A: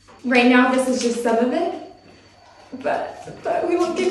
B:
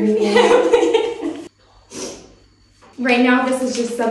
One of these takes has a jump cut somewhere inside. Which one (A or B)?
B